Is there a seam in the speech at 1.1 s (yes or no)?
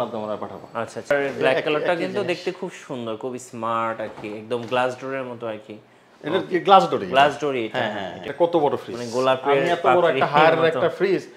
yes